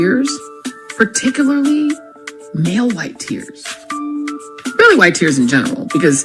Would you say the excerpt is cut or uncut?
uncut